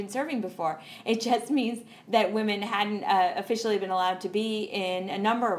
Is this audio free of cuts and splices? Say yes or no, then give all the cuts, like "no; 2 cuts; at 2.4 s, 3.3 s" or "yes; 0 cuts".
yes; 0 cuts